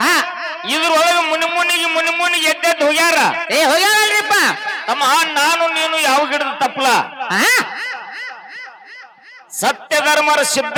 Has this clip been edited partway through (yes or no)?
no